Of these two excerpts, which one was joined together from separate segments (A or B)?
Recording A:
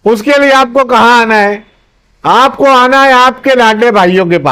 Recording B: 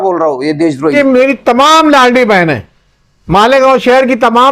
B